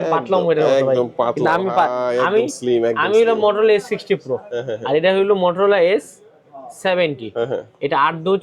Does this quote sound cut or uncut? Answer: uncut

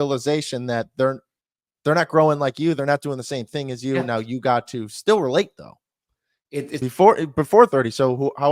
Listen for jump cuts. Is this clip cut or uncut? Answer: cut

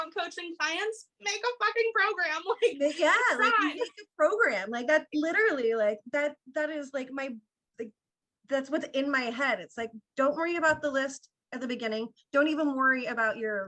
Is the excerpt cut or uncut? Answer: uncut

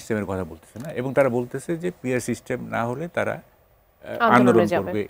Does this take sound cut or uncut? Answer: uncut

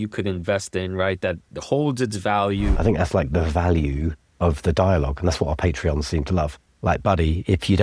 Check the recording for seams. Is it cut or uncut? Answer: cut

